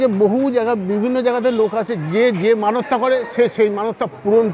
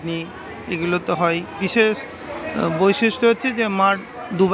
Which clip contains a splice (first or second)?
second